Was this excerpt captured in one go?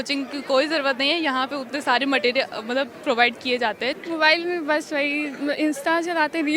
no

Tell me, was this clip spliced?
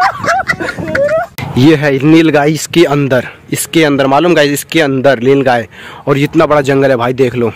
yes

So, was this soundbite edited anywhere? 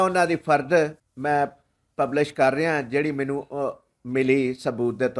yes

